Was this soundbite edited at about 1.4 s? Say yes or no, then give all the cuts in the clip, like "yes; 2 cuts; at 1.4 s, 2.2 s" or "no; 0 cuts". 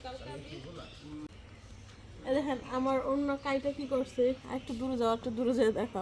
yes; 1 cut; at 1.4 s